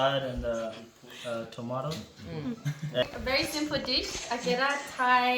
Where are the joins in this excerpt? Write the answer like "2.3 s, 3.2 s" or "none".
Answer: 3.0 s